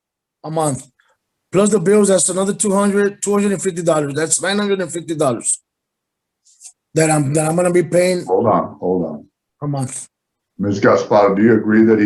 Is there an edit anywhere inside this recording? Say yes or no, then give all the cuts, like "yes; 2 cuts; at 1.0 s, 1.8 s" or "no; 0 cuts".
no; 0 cuts